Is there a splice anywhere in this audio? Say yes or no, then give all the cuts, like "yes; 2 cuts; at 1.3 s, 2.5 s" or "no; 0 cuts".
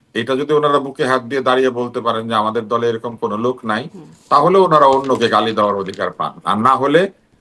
no; 0 cuts